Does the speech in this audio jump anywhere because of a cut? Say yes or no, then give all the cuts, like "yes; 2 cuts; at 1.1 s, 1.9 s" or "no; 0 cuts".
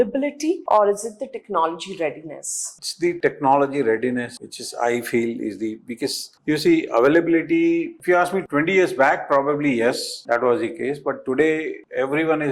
no; 0 cuts